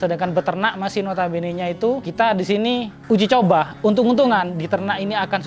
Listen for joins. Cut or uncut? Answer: cut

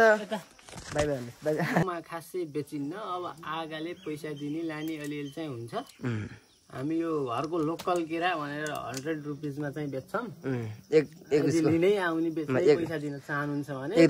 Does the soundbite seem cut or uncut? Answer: cut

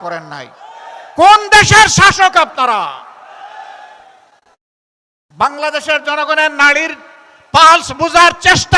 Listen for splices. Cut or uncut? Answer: cut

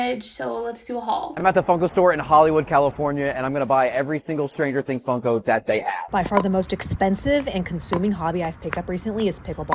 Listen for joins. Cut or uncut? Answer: cut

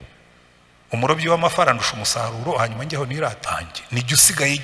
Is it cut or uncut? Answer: cut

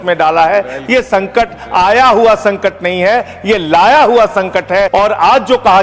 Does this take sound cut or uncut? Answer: cut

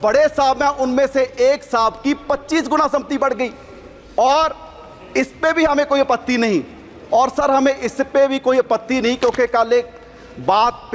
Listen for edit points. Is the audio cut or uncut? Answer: uncut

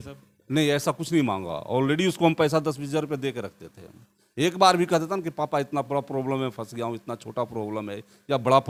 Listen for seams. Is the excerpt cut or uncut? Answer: uncut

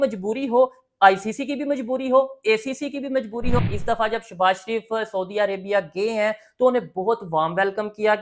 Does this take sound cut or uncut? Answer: cut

